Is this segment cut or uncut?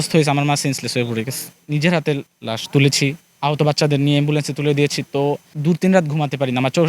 cut